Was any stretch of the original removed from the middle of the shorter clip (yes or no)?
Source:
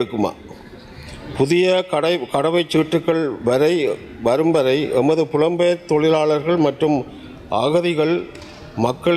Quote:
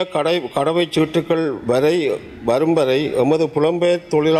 no